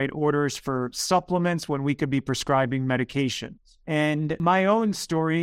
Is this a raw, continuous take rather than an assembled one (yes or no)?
no